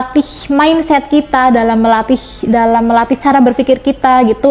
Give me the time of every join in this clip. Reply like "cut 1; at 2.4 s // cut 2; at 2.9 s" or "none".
none